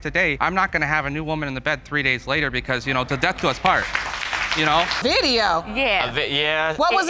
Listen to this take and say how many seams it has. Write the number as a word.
one